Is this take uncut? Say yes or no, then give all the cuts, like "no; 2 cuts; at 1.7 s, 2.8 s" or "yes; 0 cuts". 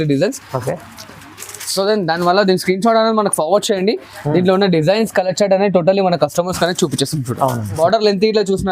no; 1 cut; at 7.7 s